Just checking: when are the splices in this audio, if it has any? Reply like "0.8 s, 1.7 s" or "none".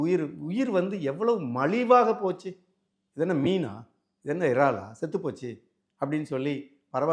none